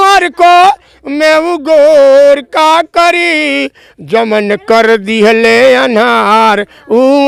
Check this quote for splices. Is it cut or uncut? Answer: uncut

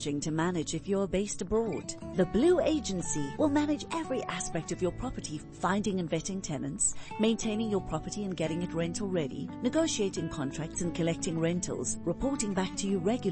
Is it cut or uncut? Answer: uncut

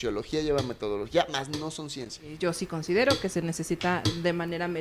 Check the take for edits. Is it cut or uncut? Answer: cut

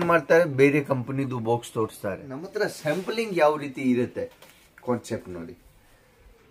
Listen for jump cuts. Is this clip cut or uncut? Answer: cut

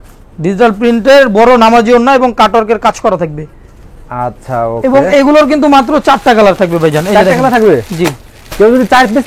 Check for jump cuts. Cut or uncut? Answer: uncut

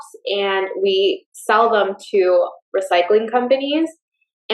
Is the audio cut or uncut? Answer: uncut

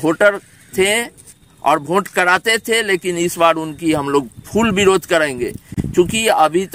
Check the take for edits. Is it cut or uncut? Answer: uncut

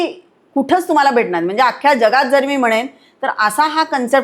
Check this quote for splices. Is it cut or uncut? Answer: uncut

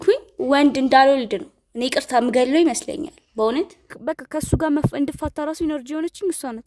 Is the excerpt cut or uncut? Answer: cut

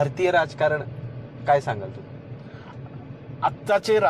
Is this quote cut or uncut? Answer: uncut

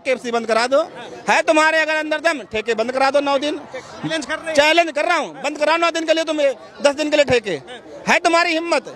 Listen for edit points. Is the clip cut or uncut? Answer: cut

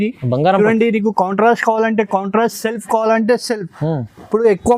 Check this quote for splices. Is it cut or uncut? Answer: uncut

